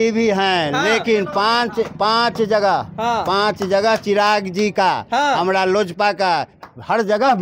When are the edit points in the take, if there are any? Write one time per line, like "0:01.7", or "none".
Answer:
none

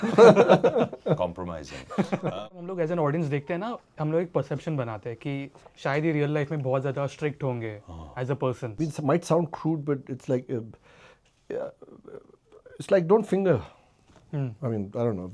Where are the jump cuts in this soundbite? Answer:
0:02.4
0:08.7

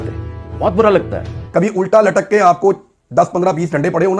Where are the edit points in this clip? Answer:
0:01.3

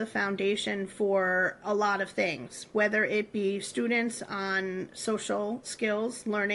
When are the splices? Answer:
none

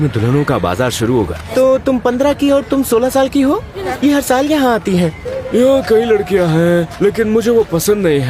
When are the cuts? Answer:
0:01.4
0:03.8
0:05.3

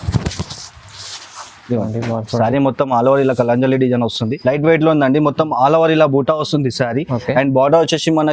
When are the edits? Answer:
0:04.4

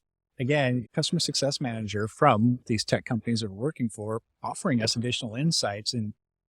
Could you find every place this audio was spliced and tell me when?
0:00.8
0:02.6

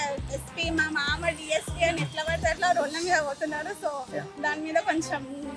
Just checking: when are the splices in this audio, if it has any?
none

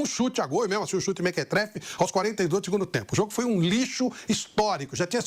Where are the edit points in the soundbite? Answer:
none

